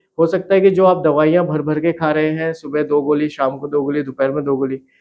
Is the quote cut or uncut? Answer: uncut